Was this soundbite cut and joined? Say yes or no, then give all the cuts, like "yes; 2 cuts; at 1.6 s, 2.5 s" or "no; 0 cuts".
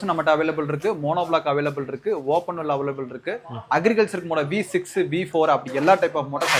no; 0 cuts